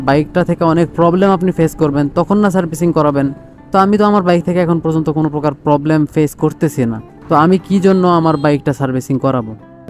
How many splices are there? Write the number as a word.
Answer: zero